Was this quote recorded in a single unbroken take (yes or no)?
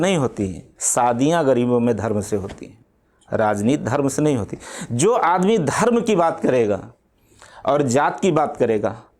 yes